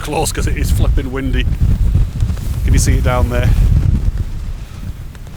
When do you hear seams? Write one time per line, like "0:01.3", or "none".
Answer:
none